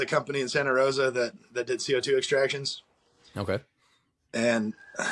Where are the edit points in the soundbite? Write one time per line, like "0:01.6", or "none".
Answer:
none